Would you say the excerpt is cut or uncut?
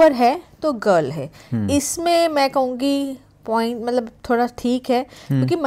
uncut